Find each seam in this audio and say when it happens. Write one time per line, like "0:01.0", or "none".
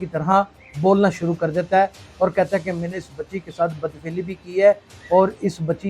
none